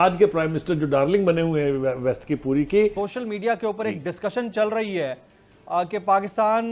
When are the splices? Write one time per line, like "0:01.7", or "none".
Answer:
0:02.9